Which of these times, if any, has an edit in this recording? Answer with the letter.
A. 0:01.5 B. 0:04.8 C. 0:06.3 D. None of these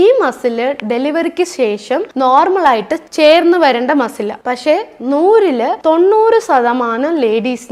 D